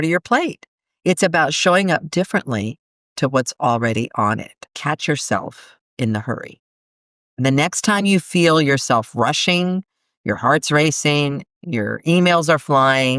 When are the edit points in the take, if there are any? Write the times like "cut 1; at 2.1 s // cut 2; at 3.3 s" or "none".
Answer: cut 1; at 4.7 s